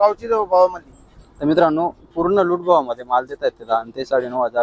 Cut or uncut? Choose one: uncut